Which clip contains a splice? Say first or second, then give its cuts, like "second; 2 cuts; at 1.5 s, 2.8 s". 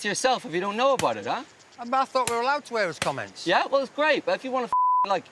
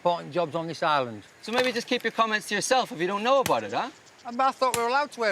second; 1 cut; at 1.2 s